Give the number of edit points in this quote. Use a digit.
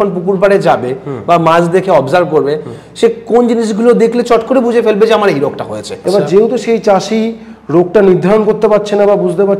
1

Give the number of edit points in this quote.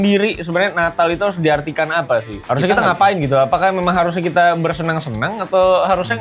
1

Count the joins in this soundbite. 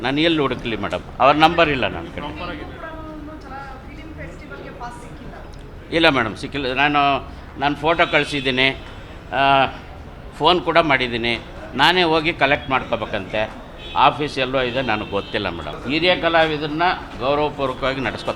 1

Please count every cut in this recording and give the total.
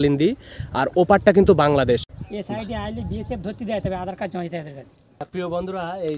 2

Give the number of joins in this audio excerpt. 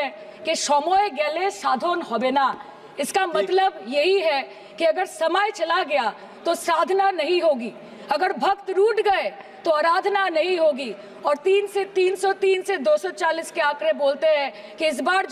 0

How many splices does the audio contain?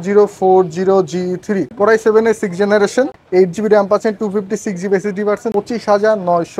3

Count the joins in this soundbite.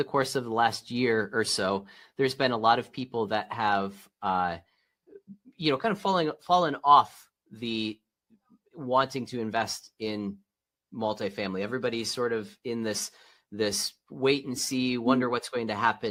0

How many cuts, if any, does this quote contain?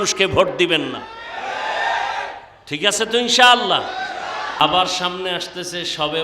1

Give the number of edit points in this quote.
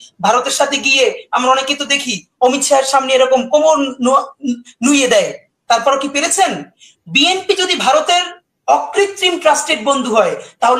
0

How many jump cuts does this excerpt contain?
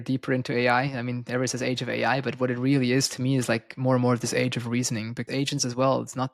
1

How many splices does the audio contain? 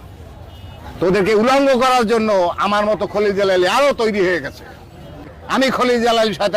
1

